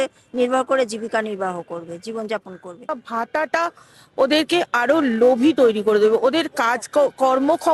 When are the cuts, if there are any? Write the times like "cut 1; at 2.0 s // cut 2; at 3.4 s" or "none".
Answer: cut 1; at 3.0 s